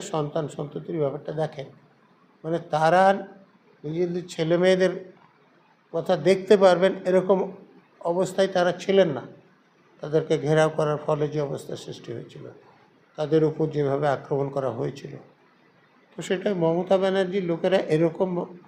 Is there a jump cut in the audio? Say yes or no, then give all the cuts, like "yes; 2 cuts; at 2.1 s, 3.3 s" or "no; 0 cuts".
no; 0 cuts